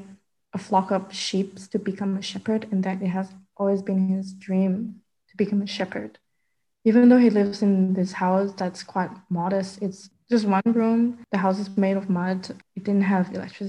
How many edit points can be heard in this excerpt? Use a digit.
2